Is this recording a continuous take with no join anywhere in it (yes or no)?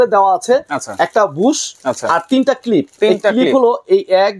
yes